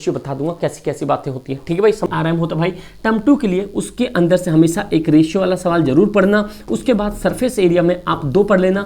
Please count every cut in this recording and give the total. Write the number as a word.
one